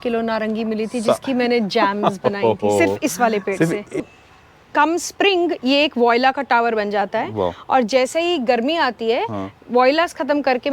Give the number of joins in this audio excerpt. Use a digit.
1